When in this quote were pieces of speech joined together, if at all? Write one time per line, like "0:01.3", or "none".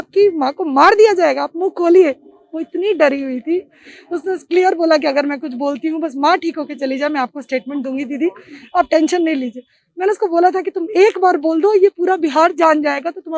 none